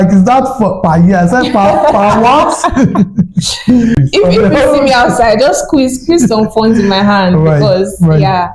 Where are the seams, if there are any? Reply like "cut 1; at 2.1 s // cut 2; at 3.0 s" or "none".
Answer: cut 1; at 4.0 s